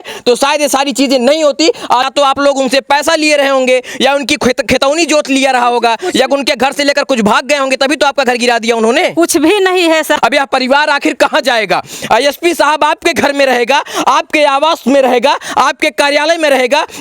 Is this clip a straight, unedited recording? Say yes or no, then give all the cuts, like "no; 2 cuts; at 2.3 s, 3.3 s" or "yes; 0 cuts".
no; 2 cuts; at 2.1 s, 10.2 s